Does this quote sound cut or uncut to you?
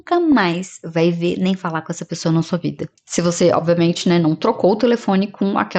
uncut